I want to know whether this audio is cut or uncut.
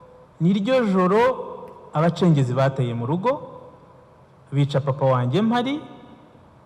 uncut